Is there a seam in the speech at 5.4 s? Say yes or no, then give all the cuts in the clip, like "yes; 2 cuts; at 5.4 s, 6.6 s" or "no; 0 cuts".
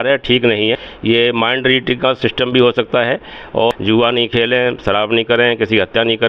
no; 2 cuts; at 0.9 s, 3.7 s